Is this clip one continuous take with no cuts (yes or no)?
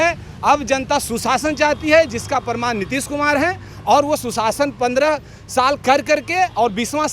yes